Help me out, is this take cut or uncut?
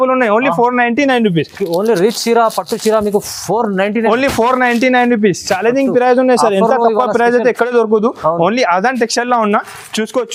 uncut